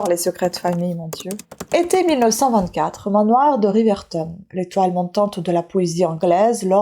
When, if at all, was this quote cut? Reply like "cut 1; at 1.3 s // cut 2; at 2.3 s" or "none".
cut 1; at 1.5 s